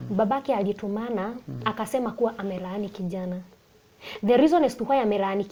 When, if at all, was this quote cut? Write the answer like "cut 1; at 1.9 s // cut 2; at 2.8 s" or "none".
none